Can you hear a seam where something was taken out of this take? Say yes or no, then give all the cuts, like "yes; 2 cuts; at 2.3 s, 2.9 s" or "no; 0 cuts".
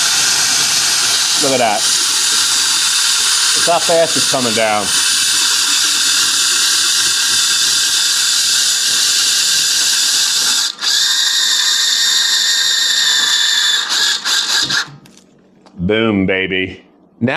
no; 0 cuts